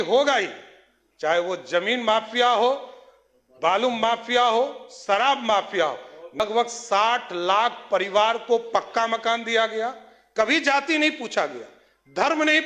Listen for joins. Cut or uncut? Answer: cut